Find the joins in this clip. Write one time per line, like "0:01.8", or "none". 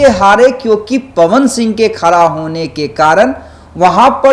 none